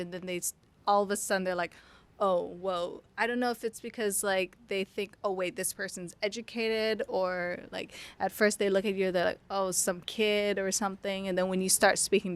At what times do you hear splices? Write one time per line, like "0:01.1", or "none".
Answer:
none